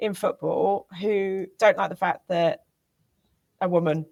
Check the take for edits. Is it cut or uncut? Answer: uncut